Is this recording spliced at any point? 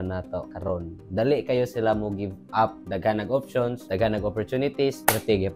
yes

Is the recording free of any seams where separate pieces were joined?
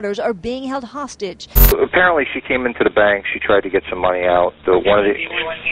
no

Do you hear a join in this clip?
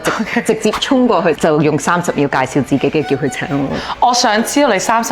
no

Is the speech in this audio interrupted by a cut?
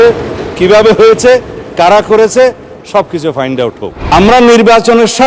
yes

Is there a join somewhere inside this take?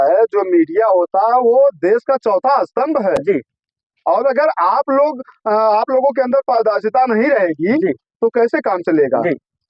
no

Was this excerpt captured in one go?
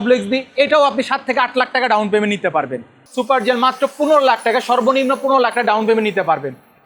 no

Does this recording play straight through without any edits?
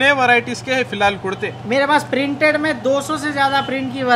yes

